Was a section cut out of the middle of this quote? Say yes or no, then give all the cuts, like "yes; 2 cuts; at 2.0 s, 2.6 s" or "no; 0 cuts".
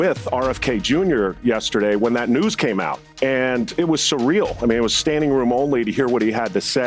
yes; 2 cuts; at 3.1 s, 3.7 s